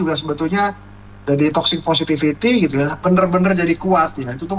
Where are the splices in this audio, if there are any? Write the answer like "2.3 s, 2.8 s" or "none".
3.0 s